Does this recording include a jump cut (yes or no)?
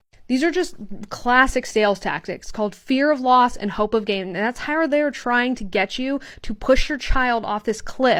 no